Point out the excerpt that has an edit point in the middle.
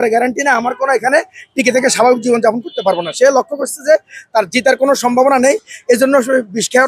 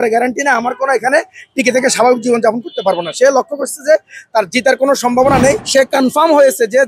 second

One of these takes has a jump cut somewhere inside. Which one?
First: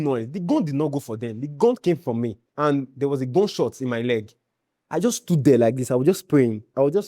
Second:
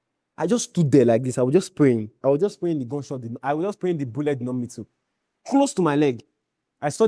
first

